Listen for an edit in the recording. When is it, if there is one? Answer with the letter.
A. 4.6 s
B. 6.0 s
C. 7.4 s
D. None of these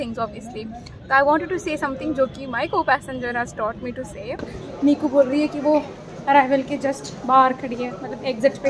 A